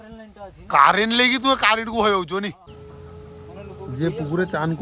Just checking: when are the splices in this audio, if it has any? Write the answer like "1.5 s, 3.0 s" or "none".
2.7 s